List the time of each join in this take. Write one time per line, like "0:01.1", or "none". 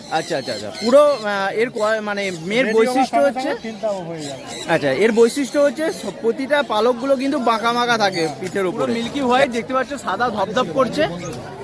0:08.9